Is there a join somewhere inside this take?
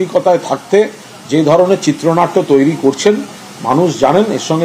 no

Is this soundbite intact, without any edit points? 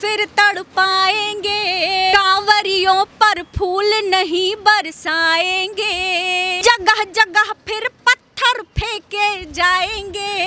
no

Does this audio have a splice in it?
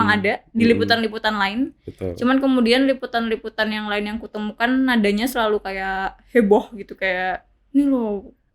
no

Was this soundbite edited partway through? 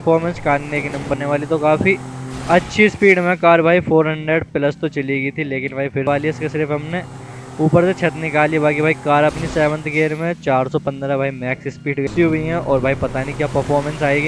yes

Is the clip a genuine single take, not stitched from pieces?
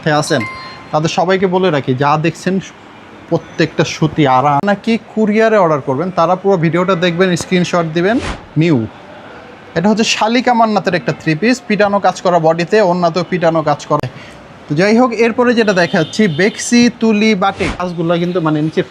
no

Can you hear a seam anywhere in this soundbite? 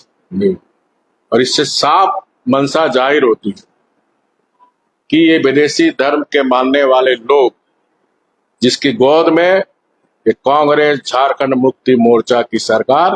no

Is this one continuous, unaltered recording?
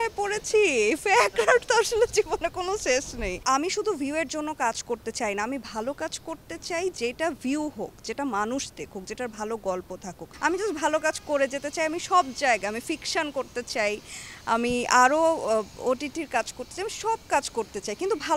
no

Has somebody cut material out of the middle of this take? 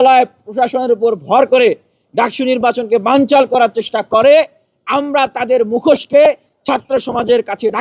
no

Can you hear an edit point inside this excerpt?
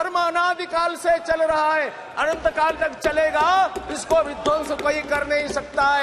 no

